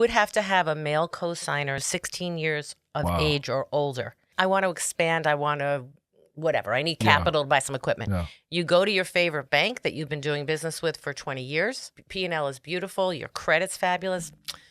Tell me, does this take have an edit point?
yes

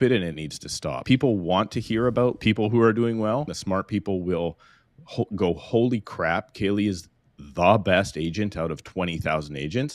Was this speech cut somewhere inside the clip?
yes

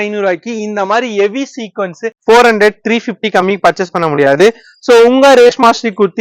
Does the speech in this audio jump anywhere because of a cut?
yes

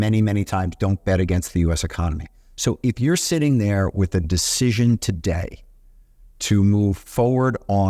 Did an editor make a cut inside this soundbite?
no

